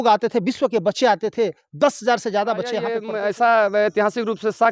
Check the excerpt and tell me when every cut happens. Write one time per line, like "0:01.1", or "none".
0:03.0